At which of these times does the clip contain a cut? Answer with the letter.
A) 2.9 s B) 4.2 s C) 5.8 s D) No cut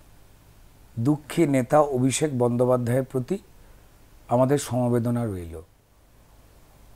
C